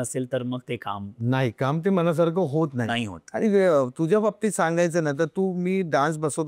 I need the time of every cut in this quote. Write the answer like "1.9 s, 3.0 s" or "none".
none